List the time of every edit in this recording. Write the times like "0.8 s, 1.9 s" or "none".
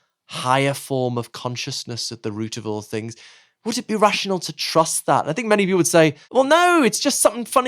6.2 s